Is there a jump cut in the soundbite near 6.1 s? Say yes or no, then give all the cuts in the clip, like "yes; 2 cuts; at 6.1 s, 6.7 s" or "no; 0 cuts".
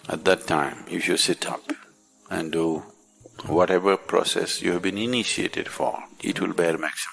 yes; 1 cut; at 6.1 s